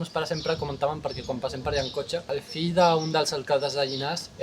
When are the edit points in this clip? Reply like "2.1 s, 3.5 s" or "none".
2.3 s

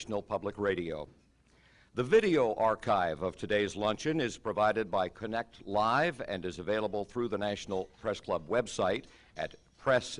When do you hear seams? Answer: none

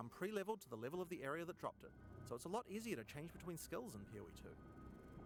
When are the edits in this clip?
none

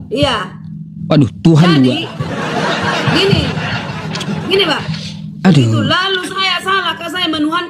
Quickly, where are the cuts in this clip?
5.4 s

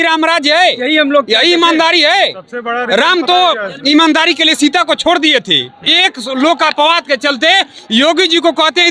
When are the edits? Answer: none

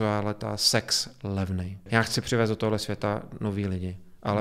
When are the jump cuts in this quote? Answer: 1.7 s

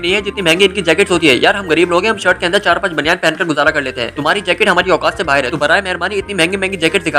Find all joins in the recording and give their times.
none

